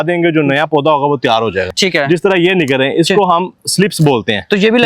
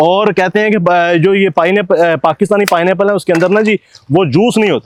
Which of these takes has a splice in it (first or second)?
first